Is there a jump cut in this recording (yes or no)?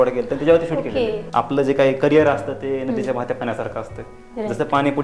yes